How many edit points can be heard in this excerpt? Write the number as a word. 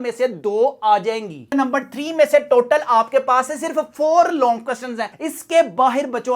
one